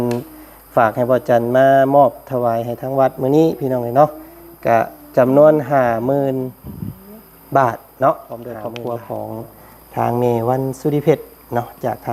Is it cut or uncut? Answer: cut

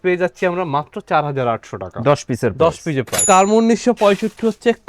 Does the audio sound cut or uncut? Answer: cut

